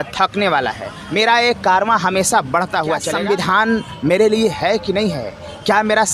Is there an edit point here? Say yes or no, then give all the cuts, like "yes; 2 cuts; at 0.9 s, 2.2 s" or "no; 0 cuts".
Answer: yes; 1 cut; at 3.1 s